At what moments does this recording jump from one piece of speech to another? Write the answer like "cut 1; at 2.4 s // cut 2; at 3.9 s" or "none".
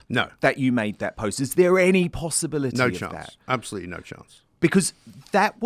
none

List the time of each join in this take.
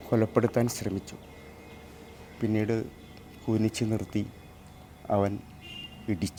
none

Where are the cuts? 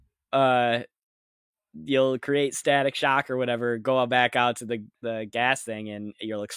cut 1; at 4.9 s

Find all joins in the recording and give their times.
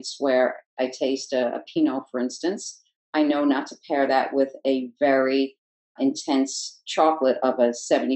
none

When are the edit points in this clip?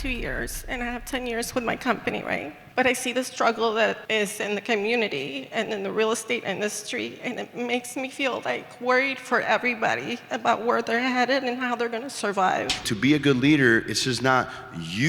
cut 1; at 2.6 s // cut 2; at 4.0 s // cut 3; at 12.8 s

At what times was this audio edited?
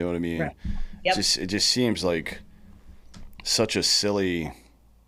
none

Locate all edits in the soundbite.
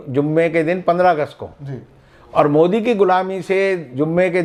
none

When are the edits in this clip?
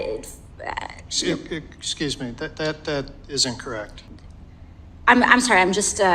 cut 1; at 4.0 s

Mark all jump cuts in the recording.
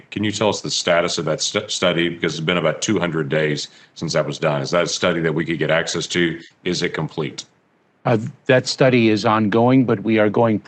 none

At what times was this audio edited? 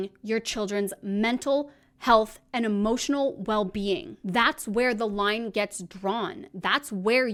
none

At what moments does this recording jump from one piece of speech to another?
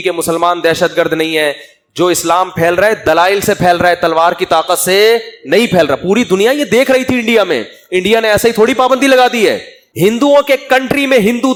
none

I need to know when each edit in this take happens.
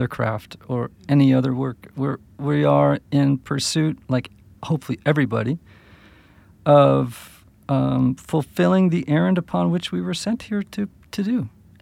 none

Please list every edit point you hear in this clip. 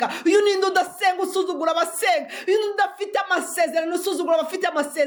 none

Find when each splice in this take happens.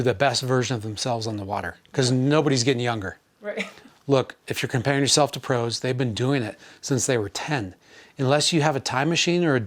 cut 1; at 3.4 s

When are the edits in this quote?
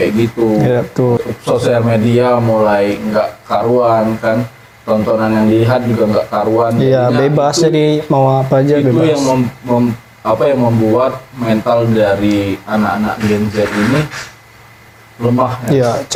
none

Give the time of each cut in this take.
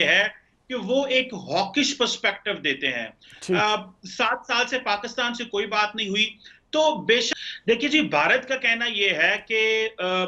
cut 1; at 7.3 s

